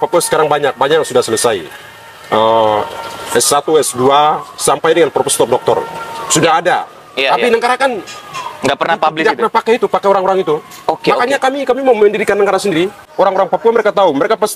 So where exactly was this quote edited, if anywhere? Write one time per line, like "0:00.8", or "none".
0:13.1